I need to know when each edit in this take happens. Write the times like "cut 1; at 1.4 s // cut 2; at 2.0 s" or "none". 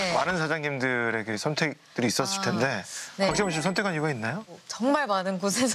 cut 1; at 4.7 s

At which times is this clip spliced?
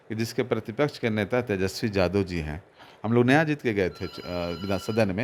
none

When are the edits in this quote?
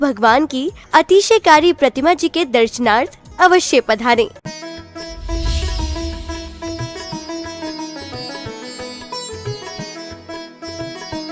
cut 1; at 4.4 s

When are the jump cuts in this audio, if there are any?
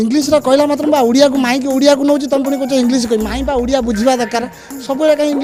none

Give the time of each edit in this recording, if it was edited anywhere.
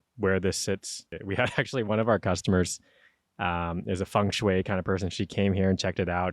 cut 1; at 1.1 s

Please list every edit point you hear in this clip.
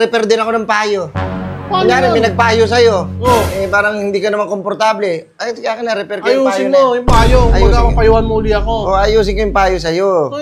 none

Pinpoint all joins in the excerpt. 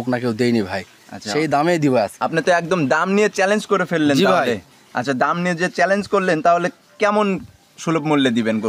cut 1; at 2.1 s

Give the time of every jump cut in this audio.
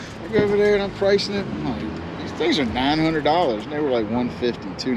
none

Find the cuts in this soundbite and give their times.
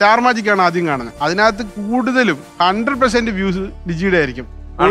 cut 1; at 1.1 s // cut 2; at 2.5 s

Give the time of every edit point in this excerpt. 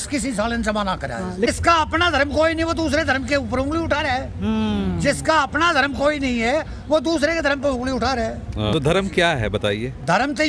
cut 1; at 1.5 s // cut 2; at 8.7 s

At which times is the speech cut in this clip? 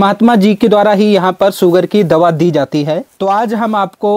cut 1; at 3.1 s

